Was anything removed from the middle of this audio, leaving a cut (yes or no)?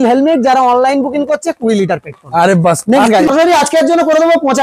yes